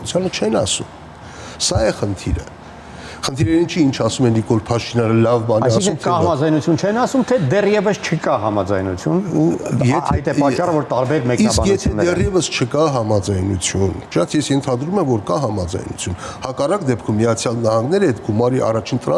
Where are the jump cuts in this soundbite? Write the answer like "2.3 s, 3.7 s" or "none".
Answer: none